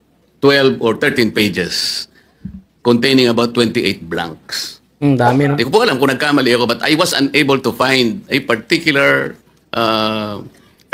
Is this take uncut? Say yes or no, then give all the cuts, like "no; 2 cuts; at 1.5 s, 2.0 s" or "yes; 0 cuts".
yes; 0 cuts